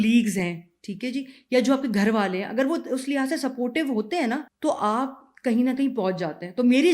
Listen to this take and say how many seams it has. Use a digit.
1